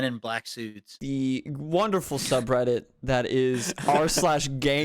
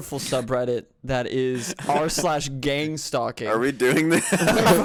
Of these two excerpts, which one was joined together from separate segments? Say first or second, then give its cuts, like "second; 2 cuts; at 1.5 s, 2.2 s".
first; 1 cut; at 0.9 s